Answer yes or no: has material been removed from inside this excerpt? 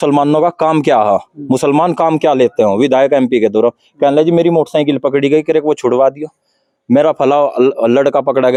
no